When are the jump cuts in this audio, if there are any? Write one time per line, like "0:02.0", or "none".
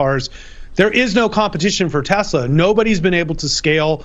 0:02.5

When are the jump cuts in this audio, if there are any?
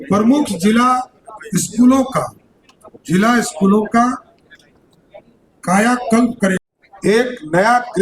0:06.6

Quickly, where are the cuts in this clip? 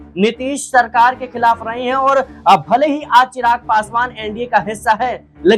none

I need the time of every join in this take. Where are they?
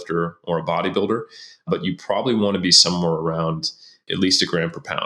0:01.6
0:04.0

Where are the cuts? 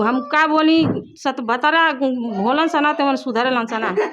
none

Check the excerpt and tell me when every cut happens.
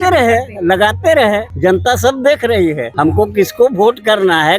0:01.5
0:02.9

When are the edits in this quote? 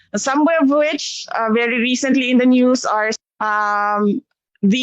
0:03.2

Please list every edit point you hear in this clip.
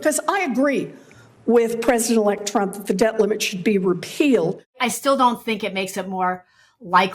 0:04.7

